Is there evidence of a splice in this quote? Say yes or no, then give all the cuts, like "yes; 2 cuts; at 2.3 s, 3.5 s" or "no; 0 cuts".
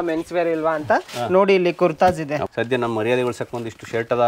yes; 1 cut; at 2.5 s